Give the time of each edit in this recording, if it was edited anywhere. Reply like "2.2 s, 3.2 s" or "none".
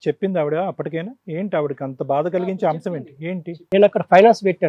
3.6 s